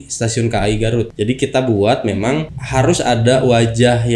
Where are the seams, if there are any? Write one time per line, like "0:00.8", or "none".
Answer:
0:01.1
0:02.6